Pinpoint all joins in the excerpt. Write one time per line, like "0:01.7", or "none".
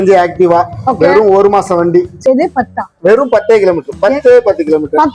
0:02.2